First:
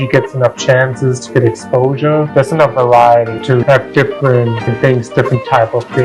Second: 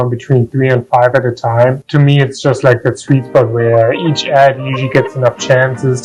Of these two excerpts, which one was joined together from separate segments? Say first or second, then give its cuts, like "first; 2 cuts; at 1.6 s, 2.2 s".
first; 3 cuts; at 2.3 s, 3.5 s, 4.7 s